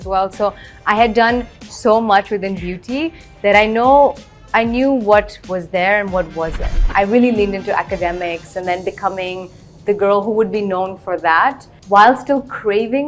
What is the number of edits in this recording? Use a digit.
2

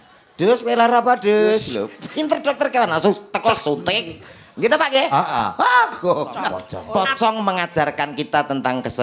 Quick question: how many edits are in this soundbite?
1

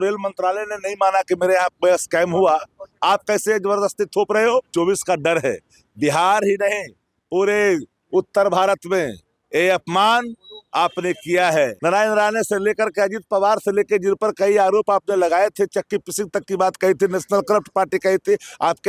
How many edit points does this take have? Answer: 2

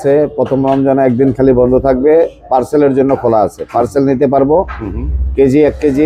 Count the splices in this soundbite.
0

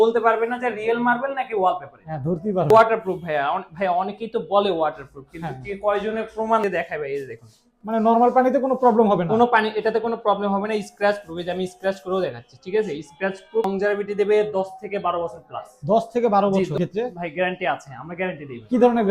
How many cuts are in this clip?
4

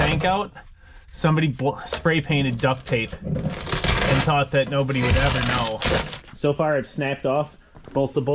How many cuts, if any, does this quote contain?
1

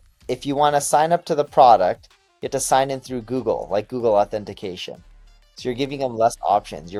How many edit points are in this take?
0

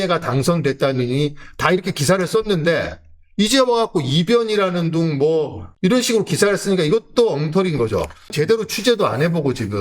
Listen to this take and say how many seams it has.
2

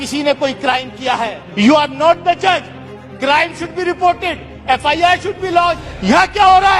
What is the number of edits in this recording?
2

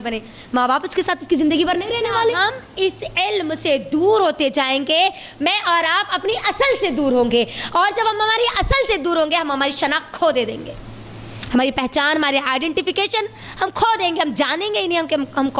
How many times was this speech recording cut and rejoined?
1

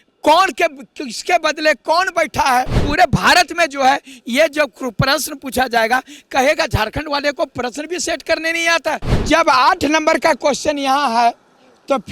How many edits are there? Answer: 2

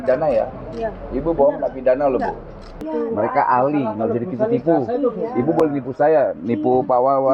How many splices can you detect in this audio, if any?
1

